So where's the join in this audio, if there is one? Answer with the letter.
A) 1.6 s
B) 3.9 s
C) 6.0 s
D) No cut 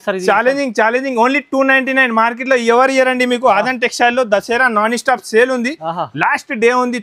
D